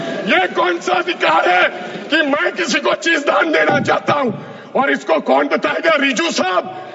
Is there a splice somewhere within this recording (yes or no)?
no